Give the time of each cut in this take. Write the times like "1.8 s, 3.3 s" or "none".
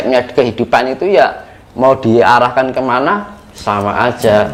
none